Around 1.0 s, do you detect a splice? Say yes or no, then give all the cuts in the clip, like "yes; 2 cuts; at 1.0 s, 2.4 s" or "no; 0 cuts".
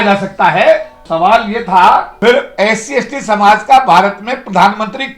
yes; 2 cuts; at 1.0 s, 2.1 s